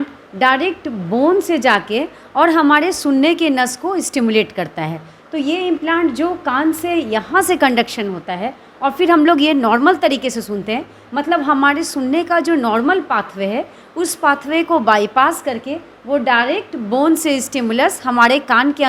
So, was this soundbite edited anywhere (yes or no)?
no